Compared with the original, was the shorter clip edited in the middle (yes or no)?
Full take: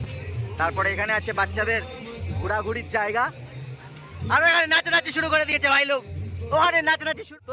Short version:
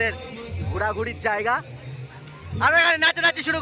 no